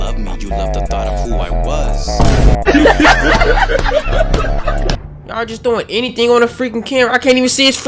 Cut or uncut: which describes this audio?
cut